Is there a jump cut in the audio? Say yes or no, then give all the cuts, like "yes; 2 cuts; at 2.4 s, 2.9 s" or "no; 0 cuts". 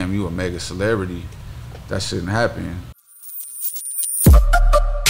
yes; 1 cut; at 2.8 s